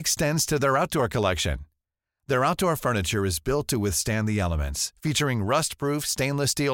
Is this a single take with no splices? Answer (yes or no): yes